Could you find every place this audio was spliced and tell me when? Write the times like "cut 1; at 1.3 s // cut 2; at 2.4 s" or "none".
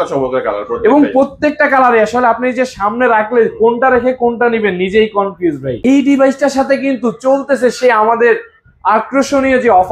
cut 1; at 5.7 s